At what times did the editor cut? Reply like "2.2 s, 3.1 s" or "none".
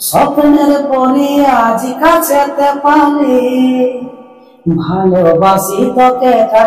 none